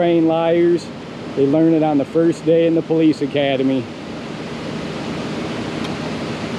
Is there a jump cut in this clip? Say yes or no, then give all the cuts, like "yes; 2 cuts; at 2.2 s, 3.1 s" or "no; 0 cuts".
no; 0 cuts